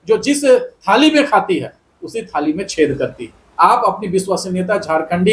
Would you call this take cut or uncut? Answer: uncut